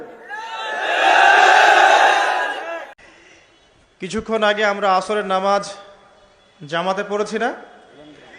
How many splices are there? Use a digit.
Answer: 1